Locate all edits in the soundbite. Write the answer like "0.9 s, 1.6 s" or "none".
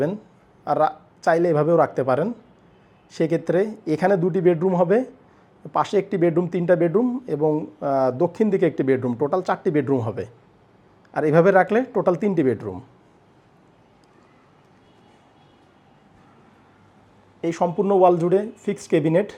none